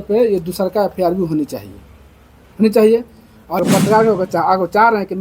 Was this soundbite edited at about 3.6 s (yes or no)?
yes